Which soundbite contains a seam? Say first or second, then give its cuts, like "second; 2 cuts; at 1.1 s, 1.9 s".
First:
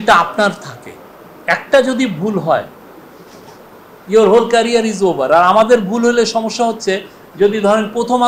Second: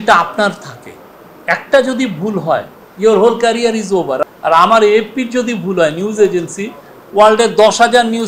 second; 2 cuts; at 2.8 s, 4.2 s